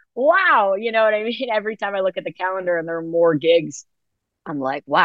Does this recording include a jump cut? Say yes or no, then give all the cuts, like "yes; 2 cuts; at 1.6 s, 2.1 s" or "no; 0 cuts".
no; 0 cuts